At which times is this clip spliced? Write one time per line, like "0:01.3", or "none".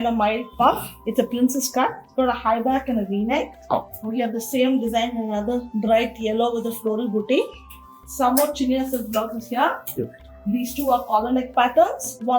none